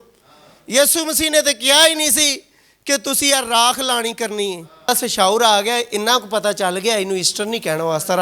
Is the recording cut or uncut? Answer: cut